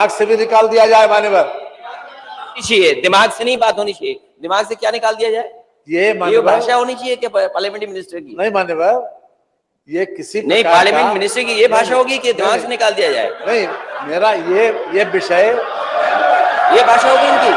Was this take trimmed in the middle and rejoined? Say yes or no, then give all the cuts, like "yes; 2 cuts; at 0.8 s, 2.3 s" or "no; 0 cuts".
no; 0 cuts